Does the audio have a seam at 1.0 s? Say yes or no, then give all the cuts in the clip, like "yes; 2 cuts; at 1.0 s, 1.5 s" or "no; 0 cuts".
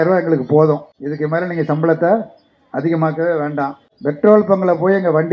yes; 2 cuts; at 1.0 s, 3.9 s